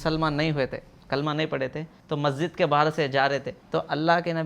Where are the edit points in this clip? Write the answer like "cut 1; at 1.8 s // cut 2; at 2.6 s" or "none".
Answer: cut 1; at 1.9 s // cut 2; at 3.6 s